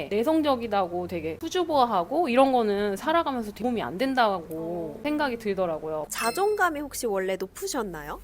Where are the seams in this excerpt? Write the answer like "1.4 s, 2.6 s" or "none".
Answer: 6.1 s